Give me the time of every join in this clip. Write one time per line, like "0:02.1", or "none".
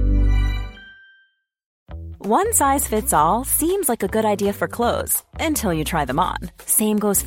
0:01.7